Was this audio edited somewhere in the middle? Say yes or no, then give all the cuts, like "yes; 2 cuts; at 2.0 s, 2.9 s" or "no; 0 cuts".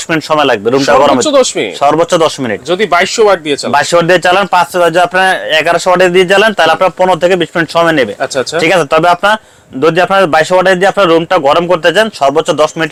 no; 0 cuts